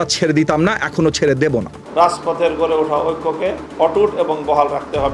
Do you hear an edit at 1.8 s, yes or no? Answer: yes